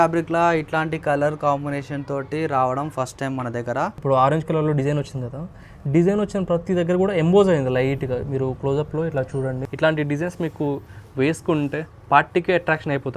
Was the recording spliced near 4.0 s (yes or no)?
yes